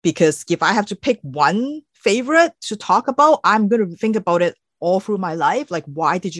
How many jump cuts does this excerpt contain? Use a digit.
1